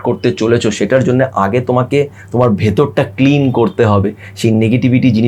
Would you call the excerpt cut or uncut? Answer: uncut